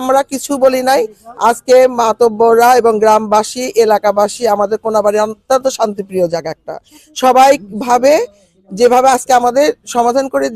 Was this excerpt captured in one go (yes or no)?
yes